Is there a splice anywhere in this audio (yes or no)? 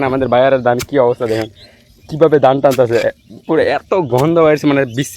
no